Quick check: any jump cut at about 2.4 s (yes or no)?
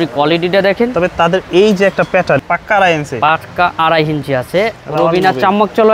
yes